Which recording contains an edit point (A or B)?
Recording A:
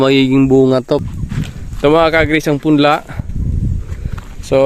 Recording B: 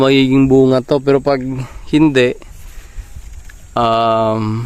A